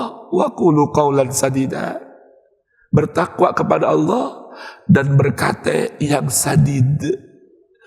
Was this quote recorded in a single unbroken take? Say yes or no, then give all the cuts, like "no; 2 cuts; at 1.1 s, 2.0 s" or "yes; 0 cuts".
yes; 0 cuts